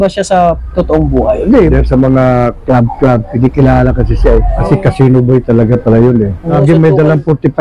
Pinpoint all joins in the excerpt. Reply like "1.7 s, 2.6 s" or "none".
1.7 s, 4.6 s, 6.6 s